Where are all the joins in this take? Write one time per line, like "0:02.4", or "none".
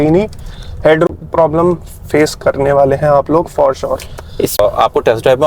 0:01.1
0:04.6